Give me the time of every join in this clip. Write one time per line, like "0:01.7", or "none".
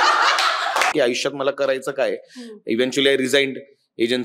0:00.9